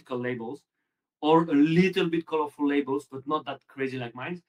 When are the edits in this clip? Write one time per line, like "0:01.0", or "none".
none